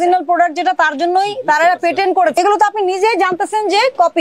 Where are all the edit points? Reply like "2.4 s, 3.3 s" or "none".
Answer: 2.4 s